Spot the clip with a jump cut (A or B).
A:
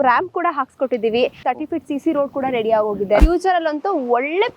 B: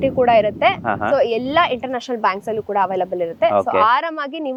A